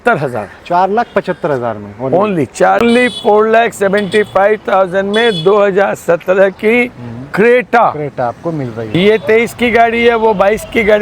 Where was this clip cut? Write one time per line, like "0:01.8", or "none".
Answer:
0:02.8
0:08.8

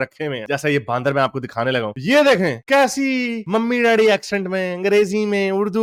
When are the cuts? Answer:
none

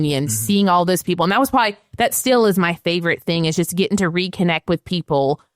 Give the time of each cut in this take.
none

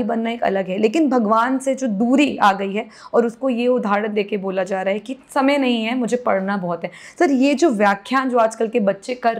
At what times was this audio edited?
none

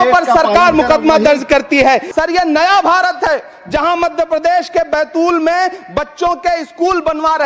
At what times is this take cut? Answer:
0:02.1

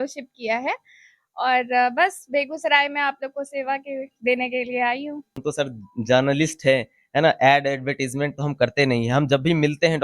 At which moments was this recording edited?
0:05.4

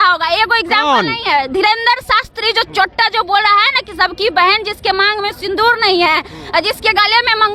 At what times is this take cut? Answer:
none

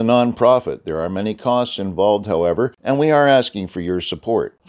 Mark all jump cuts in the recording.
0:02.8

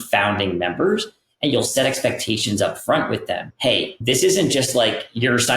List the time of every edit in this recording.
0:03.9

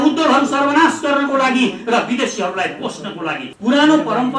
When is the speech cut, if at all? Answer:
0:03.5

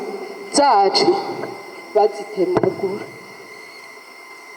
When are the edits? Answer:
none

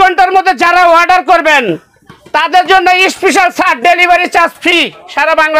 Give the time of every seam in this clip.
none

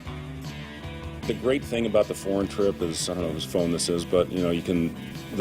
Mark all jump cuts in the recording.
0:01.3

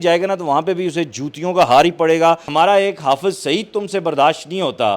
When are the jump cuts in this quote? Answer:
0:02.5

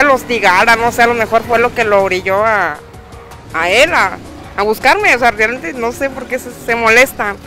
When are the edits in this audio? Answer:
none

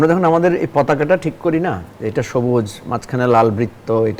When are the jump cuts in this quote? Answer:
none

